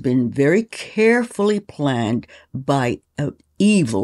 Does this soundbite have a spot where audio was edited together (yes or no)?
no